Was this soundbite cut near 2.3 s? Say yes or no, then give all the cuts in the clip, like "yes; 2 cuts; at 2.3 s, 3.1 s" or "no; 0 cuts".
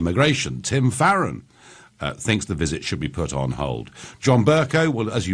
yes; 1 cut; at 2.3 s